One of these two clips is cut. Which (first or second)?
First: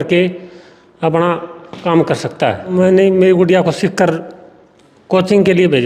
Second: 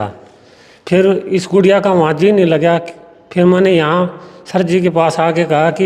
first